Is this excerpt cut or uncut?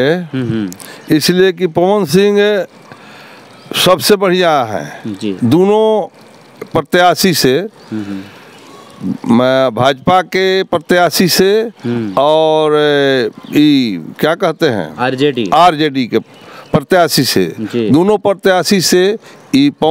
uncut